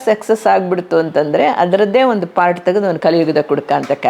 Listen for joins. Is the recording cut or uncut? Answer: cut